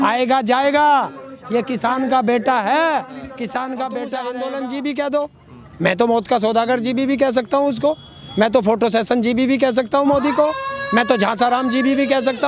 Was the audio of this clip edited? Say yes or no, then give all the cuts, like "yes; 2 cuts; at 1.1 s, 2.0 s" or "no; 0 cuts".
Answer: yes; 1 cut; at 4.2 s